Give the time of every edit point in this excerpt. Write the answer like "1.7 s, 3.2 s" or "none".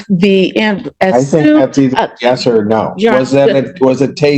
none